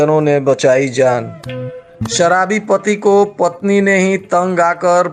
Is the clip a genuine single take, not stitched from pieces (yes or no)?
yes